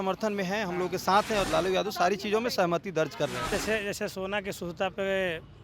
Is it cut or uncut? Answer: cut